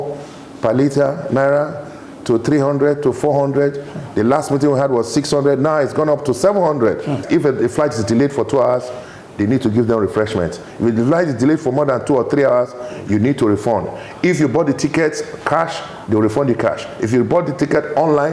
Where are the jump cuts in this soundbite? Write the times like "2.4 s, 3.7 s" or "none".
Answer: 7.2 s